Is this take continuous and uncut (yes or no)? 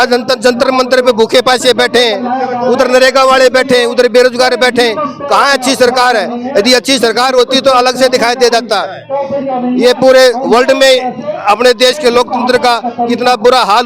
yes